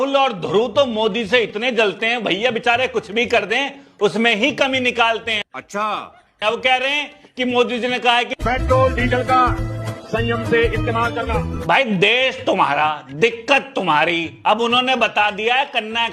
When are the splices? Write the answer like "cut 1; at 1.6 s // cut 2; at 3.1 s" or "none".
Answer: cut 1; at 11.6 s